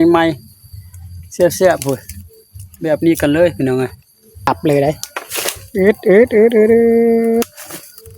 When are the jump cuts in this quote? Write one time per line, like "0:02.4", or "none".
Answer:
0:04.5

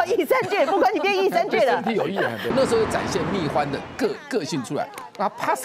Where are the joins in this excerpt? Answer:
0:02.5

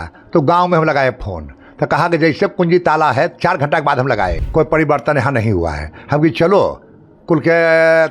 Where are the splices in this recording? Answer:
0:04.4

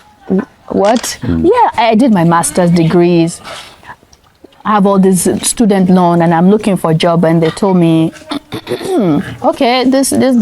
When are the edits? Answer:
0:01.2

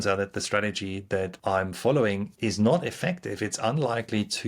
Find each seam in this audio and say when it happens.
0:01.3
0:02.3

